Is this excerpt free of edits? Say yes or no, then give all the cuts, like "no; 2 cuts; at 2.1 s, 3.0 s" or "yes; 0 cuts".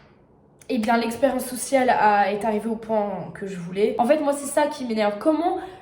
no; 1 cut; at 4.0 s